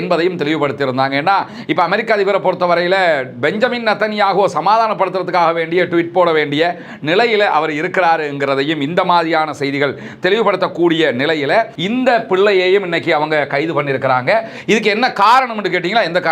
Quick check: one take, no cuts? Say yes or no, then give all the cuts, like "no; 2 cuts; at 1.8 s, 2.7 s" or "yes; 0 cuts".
no; 1 cut; at 11.8 s